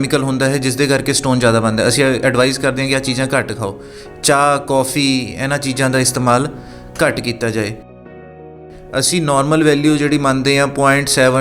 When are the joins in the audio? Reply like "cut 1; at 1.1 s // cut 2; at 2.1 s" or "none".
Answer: cut 1; at 8.3 s